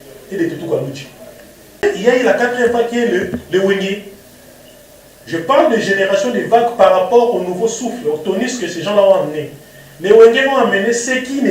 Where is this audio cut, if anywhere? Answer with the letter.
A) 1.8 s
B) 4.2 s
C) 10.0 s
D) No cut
A